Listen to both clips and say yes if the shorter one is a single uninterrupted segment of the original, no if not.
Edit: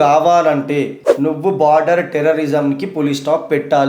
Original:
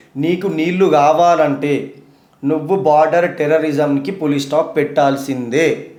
no